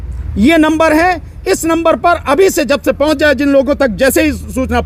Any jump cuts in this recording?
no; 0 cuts

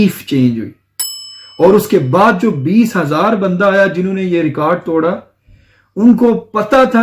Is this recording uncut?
yes; 0 cuts

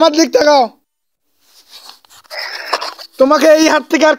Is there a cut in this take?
no; 0 cuts

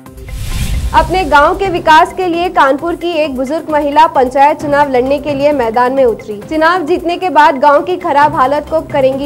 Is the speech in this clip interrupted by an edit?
no; 0 cuts

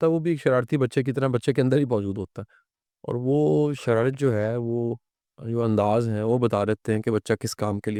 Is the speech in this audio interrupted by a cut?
no; 0 cuts

